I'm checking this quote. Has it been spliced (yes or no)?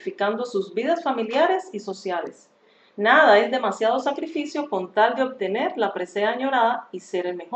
no